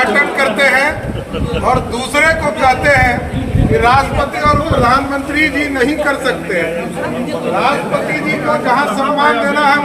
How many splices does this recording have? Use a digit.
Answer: 0